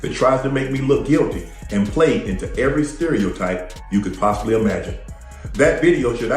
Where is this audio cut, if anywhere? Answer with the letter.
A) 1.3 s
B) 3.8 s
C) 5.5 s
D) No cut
A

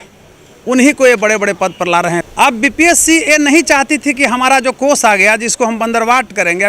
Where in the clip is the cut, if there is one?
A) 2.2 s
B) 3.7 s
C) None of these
A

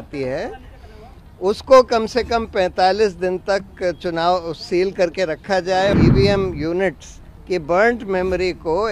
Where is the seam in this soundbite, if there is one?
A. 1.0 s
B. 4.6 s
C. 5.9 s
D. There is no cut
C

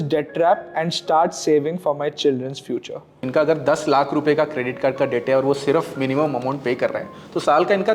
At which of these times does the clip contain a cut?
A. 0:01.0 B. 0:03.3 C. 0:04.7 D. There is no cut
B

